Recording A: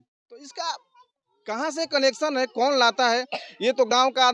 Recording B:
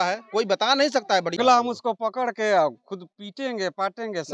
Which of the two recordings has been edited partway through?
B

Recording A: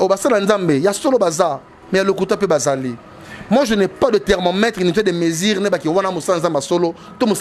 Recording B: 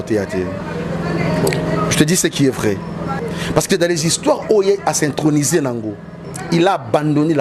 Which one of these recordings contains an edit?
B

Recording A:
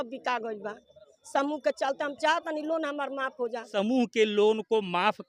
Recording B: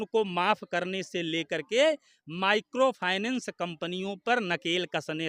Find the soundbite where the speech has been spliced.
A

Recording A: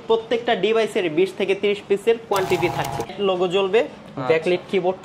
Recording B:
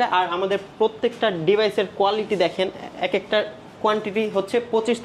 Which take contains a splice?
A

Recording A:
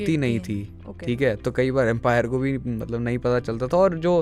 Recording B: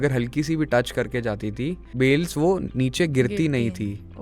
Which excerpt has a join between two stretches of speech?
B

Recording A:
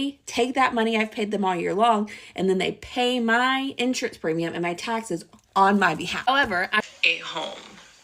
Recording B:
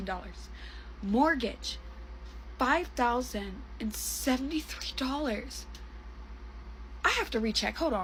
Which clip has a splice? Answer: A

